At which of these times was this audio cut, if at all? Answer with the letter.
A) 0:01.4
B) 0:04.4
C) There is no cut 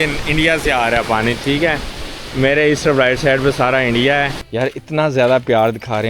B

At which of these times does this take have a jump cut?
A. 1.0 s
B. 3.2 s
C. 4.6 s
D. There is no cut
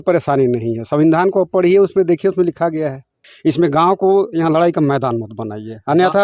B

